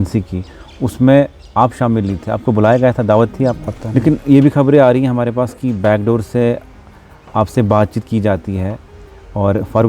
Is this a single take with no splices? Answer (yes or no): no